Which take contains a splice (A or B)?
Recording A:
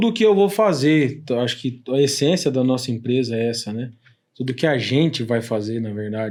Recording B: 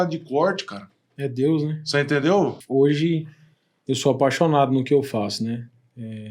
B